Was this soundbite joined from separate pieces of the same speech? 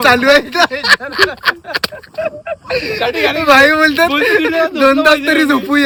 no; 0 cuts

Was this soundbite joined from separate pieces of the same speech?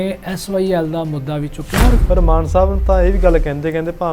yes; 1 cut; at 2.0 s

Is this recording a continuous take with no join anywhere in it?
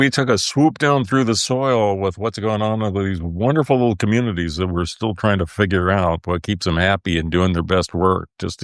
yes; 0 cuts

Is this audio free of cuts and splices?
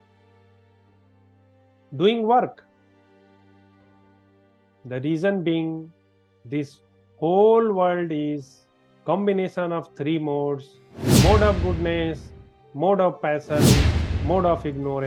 yes; 0 cuts

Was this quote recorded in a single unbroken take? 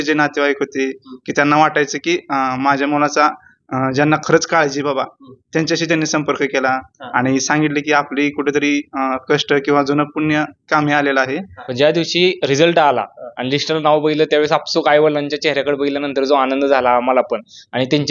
no; 1 cut; at 11.6 s

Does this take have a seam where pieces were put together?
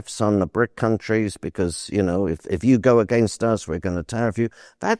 no; 0 cuts

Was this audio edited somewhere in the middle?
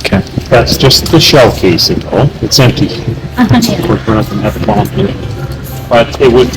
no; 0 cuts

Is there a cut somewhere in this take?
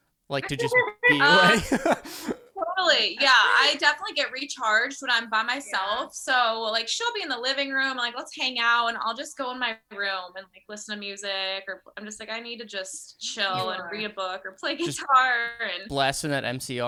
no; 0 cuts

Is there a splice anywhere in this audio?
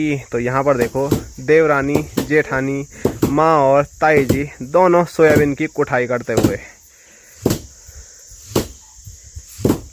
no; 0 cuts

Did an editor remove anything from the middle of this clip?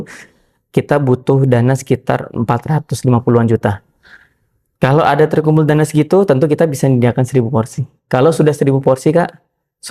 no; 0 cuts

